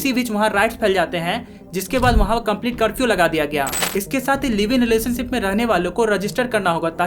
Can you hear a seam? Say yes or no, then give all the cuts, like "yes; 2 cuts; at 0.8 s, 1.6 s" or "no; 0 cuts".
yes; 1 cut; at 3.8 s